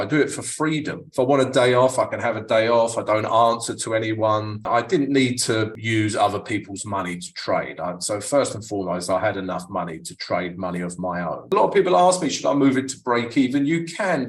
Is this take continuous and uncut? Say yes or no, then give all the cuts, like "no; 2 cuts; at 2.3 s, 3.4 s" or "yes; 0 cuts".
no; 4 cuts; at 1.0 s, 4.6 s, 5.7 s, 11.5 s